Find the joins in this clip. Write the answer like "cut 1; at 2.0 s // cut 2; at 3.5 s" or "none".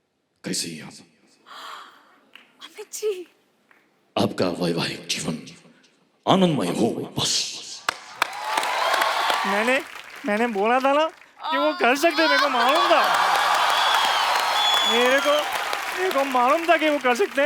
cut 1; at 9.5 s